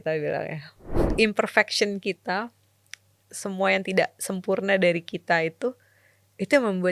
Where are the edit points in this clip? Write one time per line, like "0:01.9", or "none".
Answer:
0:01.0